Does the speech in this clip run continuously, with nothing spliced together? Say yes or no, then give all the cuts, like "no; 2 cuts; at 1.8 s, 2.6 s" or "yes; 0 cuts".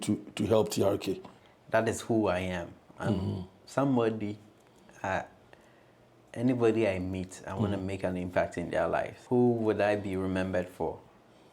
no; 2 cuts; at 1.3 s, 9.2 s